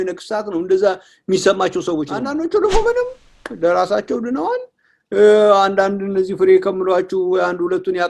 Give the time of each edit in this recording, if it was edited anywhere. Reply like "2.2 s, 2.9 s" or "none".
2.2 s